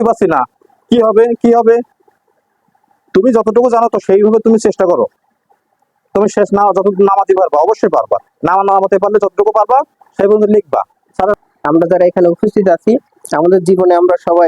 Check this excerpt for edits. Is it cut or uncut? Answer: cut